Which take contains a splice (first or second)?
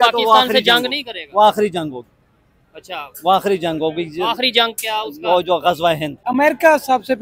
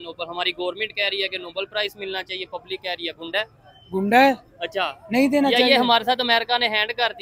first